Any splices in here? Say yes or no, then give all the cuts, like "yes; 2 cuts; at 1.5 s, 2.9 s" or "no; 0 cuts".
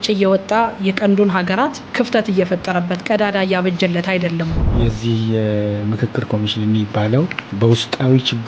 yes; 3 cuts; at 1.9 s, 4.6 s, 7.4 s